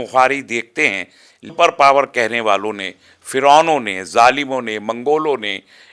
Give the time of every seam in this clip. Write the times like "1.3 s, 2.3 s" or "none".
1.5 s